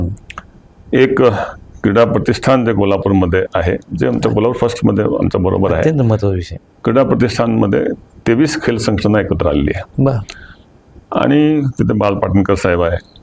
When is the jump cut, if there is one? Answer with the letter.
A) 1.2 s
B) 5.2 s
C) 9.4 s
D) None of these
D